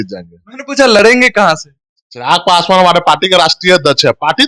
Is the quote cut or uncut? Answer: uncut